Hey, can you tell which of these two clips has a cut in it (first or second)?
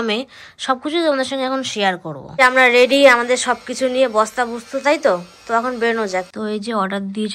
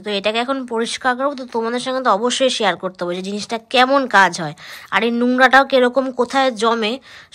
first